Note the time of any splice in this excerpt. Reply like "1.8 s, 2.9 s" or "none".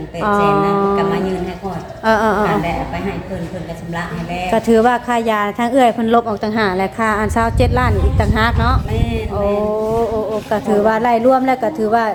none